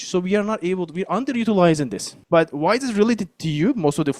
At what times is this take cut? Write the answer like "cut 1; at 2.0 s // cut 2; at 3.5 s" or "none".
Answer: cut 1; at 2.1 s